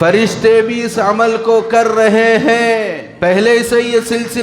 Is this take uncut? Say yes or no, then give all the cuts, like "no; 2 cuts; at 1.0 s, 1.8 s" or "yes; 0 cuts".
no; 1 cut; at 3.0 s